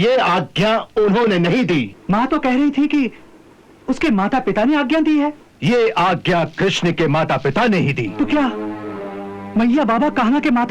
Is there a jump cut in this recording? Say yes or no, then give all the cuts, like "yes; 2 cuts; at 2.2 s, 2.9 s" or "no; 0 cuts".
yes; 3 cuts; at 1.9 s, 5.5 s, 8.1 s